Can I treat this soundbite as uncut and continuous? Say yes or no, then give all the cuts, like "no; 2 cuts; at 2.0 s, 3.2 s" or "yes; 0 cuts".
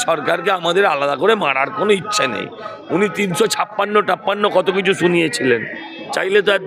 yes; 0 cuts